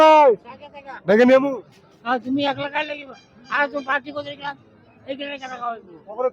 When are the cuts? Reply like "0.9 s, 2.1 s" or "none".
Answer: none